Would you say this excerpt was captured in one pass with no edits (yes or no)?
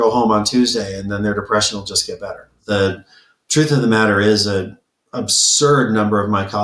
no